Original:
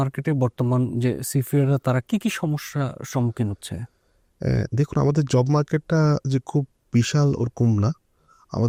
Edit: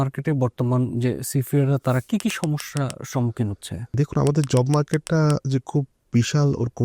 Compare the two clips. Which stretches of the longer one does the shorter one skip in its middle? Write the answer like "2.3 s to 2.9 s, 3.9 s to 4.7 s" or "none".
3.9 s to 4.7 s